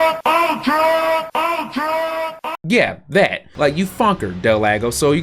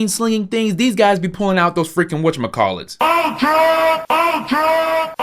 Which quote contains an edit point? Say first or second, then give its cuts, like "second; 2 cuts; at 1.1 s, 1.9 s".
first; 1 cut; at 3.4 s